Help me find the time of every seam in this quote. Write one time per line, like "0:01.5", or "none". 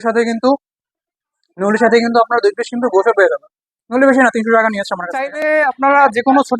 0:05.3

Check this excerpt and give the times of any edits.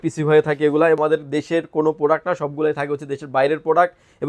0:01.0

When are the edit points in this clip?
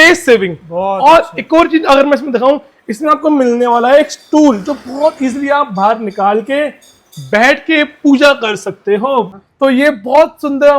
0:09.4

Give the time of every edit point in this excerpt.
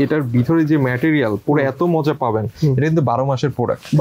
none

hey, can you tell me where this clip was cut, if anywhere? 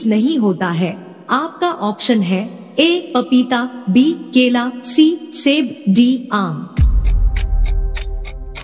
none

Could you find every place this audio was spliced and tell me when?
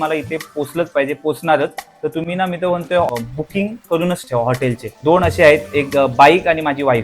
0:03.1
0:05.0

